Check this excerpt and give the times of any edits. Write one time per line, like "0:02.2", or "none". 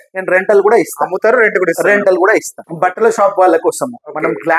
0:02.6